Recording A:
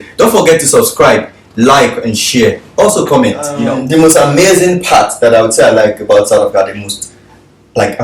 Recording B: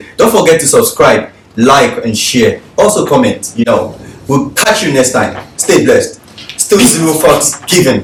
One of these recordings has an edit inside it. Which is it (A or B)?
A